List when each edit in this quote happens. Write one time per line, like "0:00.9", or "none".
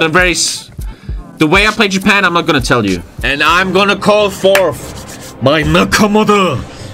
0:03.2